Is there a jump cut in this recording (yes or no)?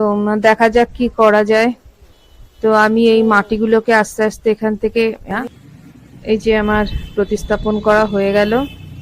yes